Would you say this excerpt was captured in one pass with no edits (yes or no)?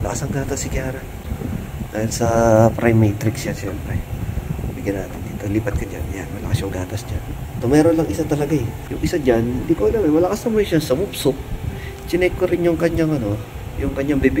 yes